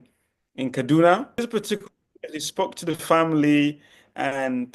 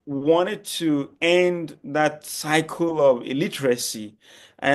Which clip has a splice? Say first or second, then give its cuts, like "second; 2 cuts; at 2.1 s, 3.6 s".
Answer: first; 1 cut; at 1.4 s